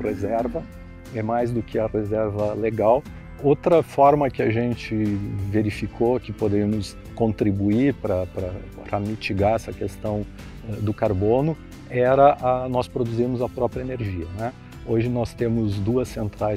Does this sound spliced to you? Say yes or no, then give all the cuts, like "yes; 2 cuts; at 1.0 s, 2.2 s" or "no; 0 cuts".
no; 0 cuts